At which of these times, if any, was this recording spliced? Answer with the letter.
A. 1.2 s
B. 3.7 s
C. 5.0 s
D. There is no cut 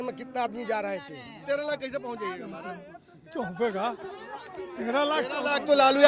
D